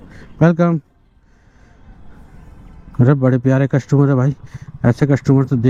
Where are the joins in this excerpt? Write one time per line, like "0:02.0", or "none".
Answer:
none